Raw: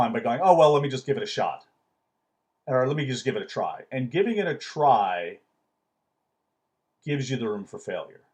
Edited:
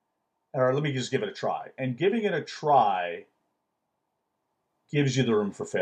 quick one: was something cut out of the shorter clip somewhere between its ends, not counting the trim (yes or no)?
no